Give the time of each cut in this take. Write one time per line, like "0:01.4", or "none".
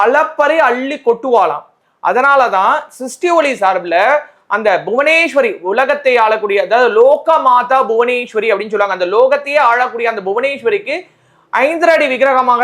none